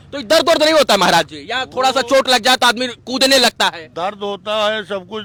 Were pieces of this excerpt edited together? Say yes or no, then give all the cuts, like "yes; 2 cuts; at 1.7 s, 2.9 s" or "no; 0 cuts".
no; 0 cuts